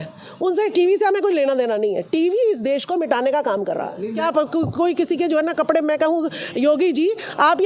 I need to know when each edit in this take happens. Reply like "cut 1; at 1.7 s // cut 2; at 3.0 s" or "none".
cut 1; at 4.2 s